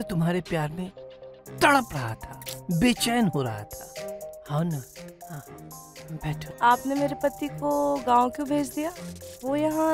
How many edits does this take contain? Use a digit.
1